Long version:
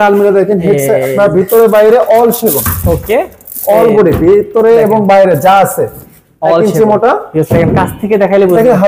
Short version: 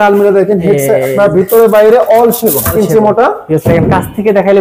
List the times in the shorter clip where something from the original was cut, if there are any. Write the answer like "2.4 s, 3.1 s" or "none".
2.7 s